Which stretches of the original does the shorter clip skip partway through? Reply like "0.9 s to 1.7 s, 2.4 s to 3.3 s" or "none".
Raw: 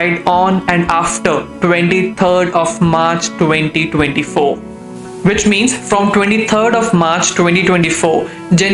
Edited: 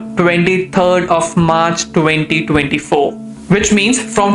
4.7 s to 5.0 s

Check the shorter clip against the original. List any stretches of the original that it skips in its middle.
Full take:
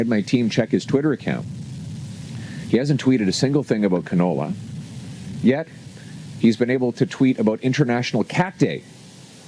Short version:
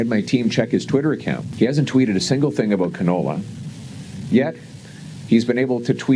1.5 s to 2.6 s

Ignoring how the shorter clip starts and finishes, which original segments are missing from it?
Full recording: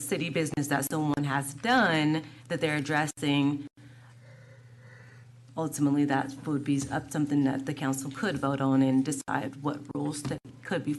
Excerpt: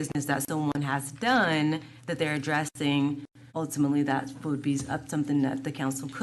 3.8 s to 5.4 s

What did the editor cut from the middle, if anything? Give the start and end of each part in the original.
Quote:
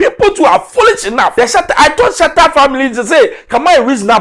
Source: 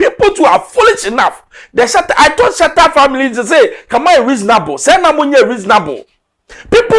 1.3 s to 1.7 s

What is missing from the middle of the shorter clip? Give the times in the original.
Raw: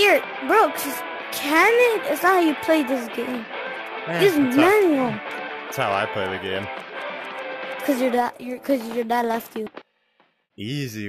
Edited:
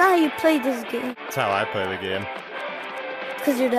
3.4 s to 5.6 s

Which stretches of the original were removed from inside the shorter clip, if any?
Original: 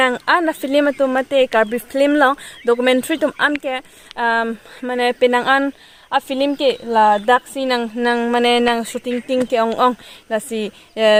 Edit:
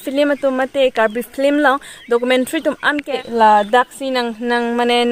3.8 s to 6.8 s

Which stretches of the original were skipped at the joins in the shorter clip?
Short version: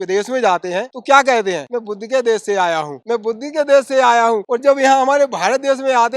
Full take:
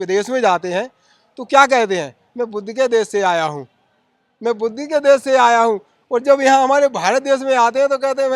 0.9 s to 1.4 s, 2.1 s to 2.4 s, 3.6 s to 4.3 s, 5.8 s to 6.1 s

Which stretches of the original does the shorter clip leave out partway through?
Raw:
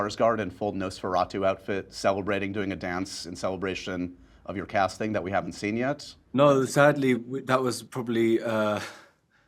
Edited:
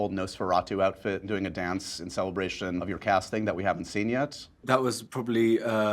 1.9 s to 2.5 s, 4.1 s to 4.5 s, 6.2 s to 7.3 s

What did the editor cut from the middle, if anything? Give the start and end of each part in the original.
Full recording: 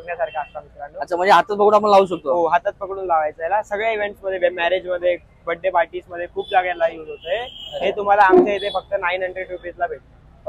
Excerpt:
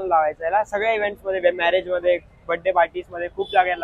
none

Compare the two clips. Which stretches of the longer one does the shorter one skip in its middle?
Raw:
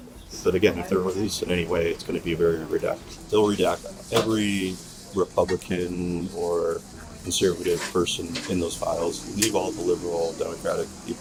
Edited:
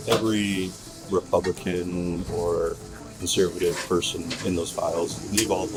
none

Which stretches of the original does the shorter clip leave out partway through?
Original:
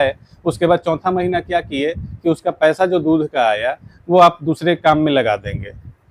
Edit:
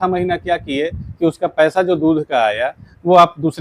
none

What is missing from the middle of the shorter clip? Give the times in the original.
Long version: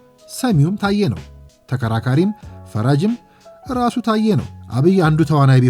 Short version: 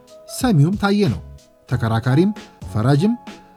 none

